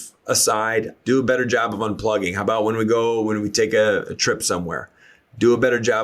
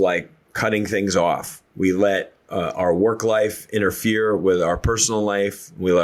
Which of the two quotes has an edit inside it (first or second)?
first